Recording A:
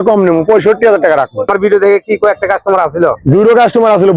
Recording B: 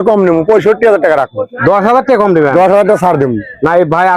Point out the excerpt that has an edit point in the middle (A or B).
A